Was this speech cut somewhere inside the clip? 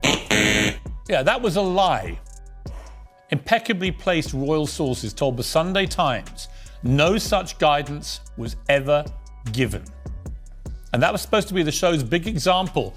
no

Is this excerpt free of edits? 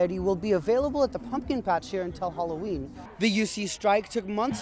no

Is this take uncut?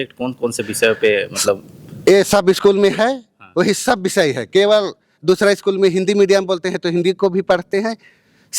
yes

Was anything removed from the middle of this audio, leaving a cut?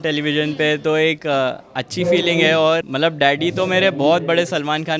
yes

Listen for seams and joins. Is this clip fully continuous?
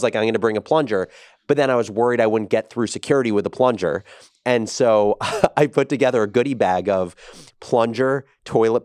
yes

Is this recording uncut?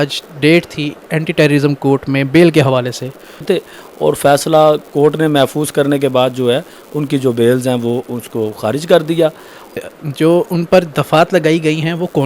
no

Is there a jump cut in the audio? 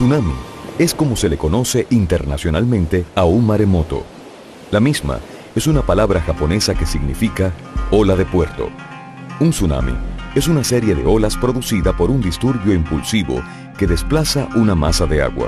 no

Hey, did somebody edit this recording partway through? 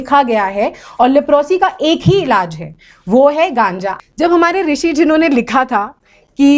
yes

